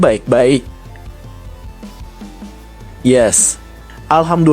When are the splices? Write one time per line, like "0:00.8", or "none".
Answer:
0:01.3
0:03.0